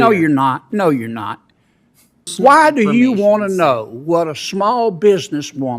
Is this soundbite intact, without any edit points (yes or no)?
no